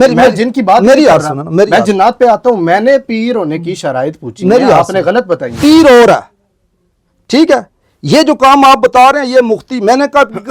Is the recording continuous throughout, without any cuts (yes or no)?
no